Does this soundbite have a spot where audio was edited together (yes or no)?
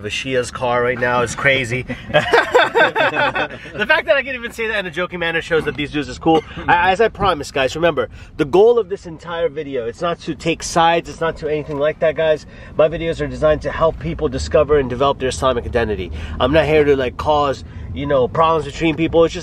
no